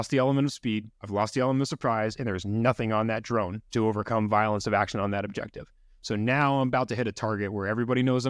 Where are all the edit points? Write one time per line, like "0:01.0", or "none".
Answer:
0:00.9
0:03.6